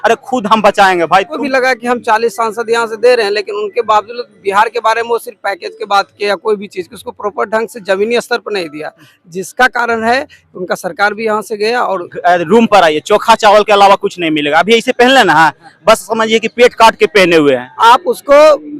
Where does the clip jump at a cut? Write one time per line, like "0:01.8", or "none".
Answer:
0:01.3
0:12.1
0:17.7